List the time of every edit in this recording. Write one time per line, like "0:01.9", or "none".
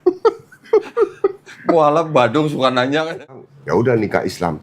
0:03.1

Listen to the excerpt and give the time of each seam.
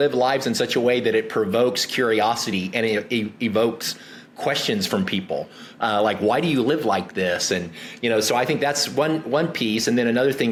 none

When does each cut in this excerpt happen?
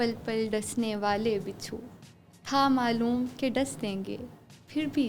none

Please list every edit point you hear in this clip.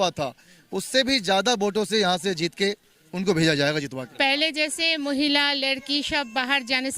0:04.0

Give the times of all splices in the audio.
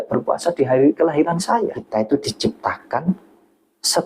0:01.8

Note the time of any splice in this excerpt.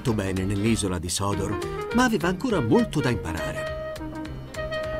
none

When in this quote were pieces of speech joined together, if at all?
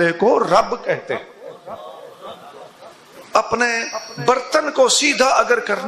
0:03.1

